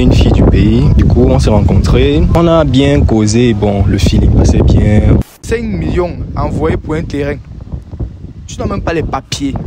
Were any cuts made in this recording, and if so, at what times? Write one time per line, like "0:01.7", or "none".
0:01.0
0:02.3
0:05.2